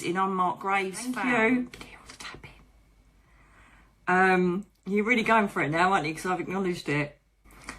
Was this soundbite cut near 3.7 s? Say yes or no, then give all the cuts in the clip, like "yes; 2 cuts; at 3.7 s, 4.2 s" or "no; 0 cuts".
no; 1 cut; at 1.1 s